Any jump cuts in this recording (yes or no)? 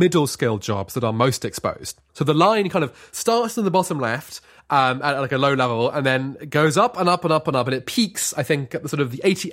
no